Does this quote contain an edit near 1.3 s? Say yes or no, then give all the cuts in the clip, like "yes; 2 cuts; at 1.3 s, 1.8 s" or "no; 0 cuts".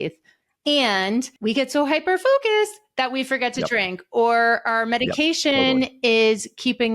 yes; 1 cut; at 1.3 s